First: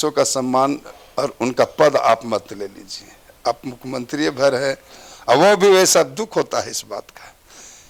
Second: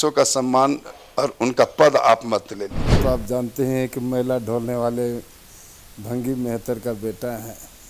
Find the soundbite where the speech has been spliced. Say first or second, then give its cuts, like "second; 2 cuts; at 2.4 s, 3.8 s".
second; 1 cut; at 3.0 s